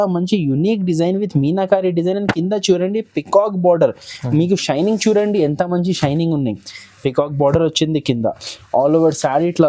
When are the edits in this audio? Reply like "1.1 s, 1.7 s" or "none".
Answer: none

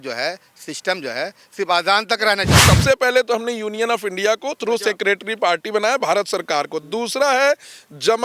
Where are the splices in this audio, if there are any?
2.6 s

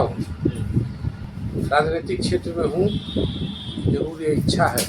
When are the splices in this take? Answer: 1.3 s

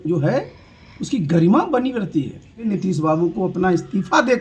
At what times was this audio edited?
2.6 s

